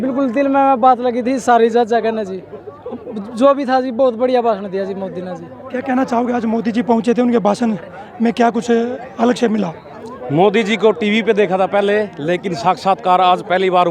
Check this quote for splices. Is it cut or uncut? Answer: uncut